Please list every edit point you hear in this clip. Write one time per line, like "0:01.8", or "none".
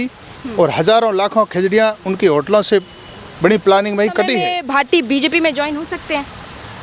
0:04.5